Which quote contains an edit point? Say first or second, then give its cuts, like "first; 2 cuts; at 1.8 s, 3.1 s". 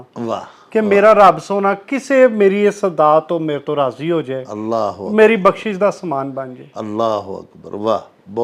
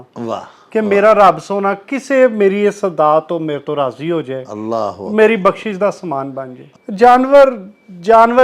second; 1 cut; at 6.6 s